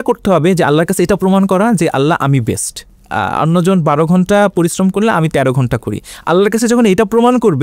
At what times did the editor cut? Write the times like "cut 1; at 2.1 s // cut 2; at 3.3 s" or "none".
cut 1; at 3.0 s